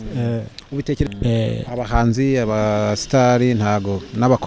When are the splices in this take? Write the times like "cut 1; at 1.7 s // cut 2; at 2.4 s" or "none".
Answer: cut 1; at 1.1 s